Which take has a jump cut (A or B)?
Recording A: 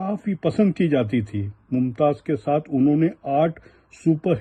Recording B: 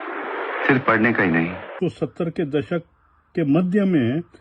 B